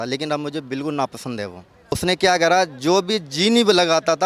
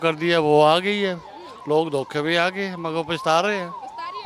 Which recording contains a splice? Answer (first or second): first